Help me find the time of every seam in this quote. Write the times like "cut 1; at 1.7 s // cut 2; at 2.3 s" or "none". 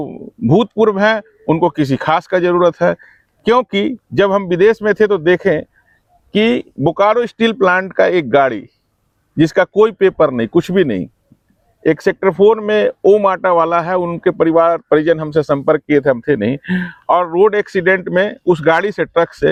none